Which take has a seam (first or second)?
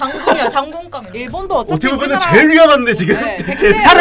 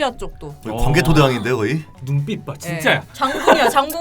second